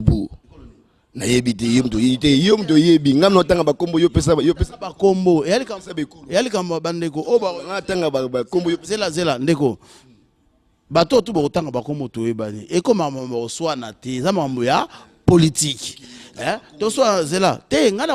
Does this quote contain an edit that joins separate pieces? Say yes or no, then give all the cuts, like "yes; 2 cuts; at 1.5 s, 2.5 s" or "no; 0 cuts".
no; 0 cuts